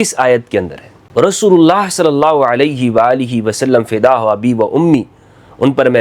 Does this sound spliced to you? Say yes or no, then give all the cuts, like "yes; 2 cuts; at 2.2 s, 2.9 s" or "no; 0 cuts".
yes; 1 cut; at 1.0 s